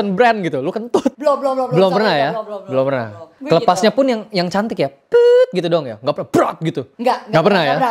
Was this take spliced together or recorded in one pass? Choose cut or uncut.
uncut